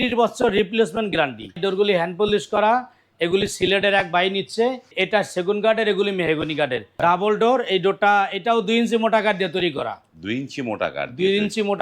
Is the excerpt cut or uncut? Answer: cut